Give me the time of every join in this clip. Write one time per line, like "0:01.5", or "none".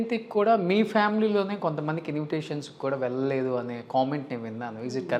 none